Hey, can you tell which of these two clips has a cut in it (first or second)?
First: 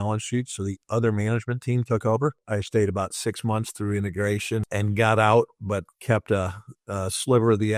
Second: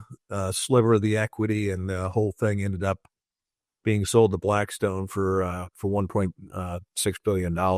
first